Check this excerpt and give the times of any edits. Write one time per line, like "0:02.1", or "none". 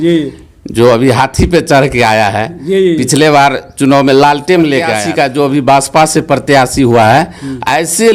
0:05.0

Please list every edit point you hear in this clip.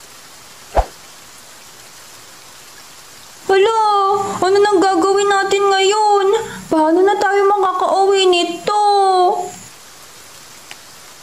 none

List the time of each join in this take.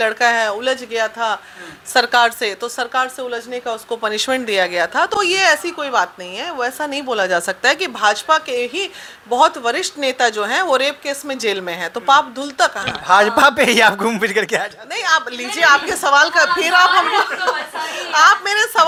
none

